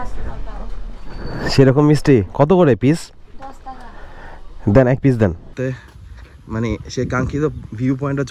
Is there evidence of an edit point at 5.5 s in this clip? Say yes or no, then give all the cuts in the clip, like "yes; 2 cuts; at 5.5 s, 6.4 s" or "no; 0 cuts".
yes; 1 cut; at 5.5 s